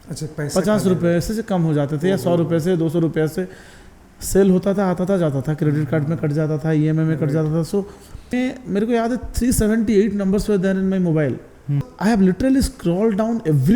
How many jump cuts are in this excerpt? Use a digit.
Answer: 2